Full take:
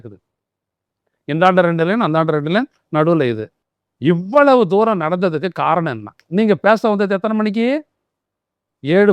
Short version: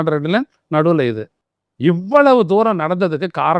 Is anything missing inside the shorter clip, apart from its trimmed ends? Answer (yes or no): no